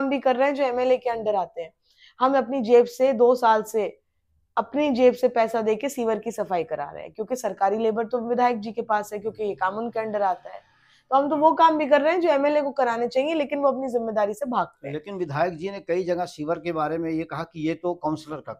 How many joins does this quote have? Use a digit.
0